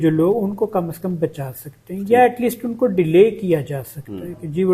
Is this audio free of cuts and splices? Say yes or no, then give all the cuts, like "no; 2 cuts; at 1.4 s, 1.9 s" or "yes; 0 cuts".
yes; 0 cuts